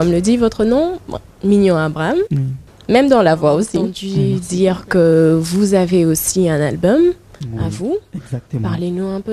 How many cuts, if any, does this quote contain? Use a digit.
1